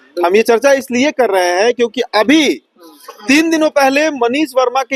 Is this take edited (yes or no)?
no